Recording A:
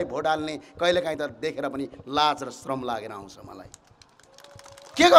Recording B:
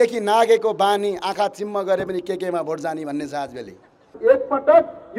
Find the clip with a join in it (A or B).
B